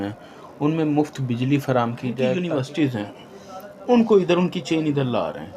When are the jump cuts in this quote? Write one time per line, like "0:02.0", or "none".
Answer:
0:02.4

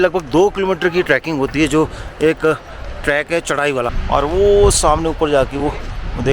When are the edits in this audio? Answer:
0:04.0

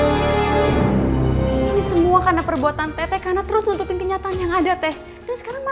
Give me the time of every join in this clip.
0:01.7

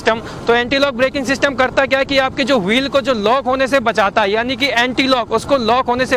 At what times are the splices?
none

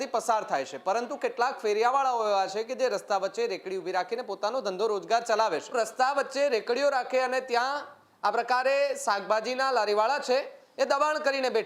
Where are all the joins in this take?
0:05.7

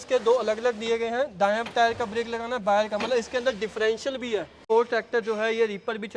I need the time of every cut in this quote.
0:04.6

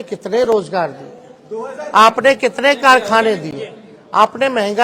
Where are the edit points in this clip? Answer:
none

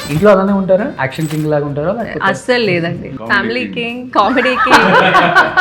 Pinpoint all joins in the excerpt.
0:01.0
0:03.1

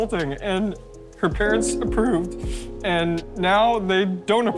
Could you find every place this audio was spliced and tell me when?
none

